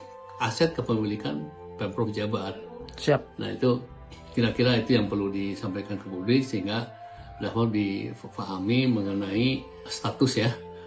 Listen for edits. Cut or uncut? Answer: cut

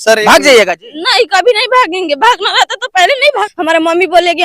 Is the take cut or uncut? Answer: cut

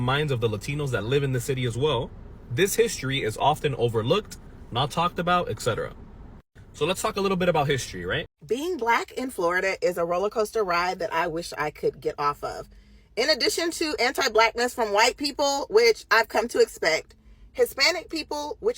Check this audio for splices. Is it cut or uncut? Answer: cut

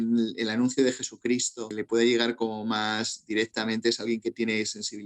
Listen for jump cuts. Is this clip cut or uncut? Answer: cut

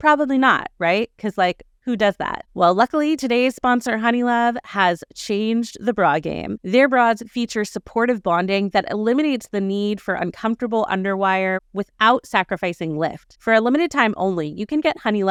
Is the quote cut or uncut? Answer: uncut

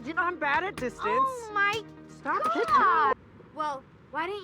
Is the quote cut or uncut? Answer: cut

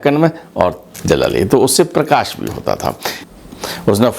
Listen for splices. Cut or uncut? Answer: cut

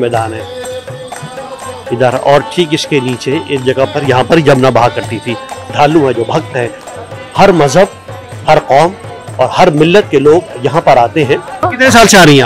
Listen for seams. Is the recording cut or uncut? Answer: cut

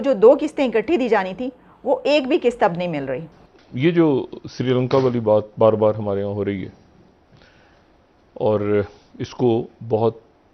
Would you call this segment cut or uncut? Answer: cut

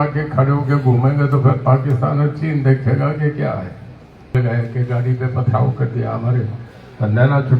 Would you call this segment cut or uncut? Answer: cut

